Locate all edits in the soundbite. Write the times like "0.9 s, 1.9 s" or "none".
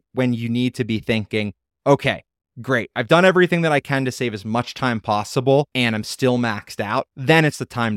5.7 s, 7.1 s